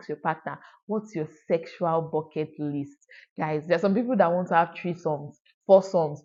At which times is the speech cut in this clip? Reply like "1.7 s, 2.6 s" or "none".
none